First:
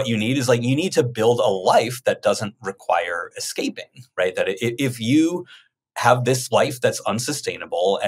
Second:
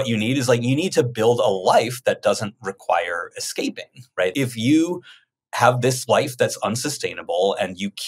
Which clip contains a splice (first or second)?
second